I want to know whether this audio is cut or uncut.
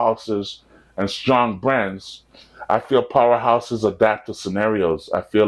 uncut